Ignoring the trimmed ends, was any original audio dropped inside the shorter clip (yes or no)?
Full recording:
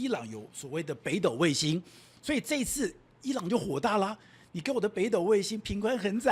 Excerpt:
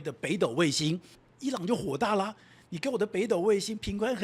yes